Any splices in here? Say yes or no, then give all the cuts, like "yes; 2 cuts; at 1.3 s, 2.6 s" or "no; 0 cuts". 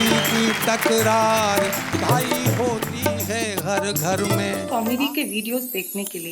yes; 1 cut; at 4.6 s